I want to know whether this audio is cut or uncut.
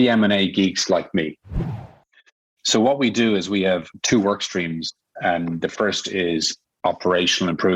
cut